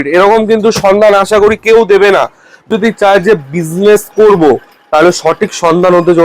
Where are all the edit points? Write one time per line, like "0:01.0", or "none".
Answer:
0:02.7